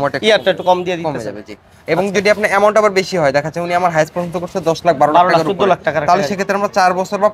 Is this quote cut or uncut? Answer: uncut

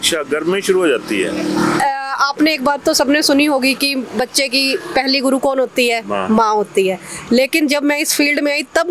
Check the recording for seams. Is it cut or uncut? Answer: uncut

